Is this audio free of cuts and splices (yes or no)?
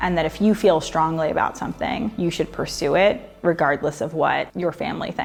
yes